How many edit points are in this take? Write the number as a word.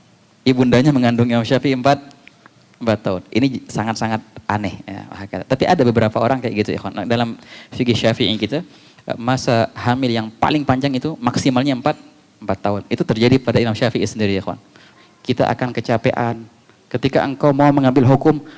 one